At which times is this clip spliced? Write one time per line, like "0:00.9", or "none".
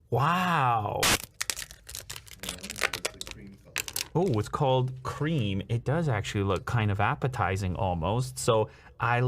0:01.1